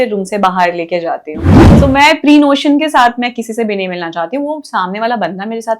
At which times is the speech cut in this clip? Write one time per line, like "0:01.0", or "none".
0:01.6